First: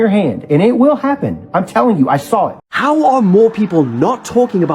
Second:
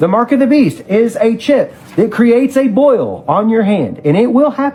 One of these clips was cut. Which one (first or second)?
first